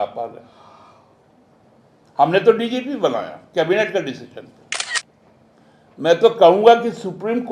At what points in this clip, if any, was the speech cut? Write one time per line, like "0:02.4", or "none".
0:04.9